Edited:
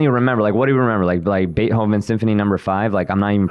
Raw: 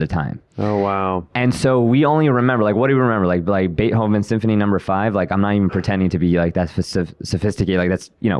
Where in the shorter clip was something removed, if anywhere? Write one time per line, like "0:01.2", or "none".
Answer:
none